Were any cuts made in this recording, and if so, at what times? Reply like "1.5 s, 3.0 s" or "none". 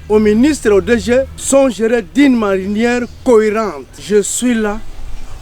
1.4 s, 3.9 s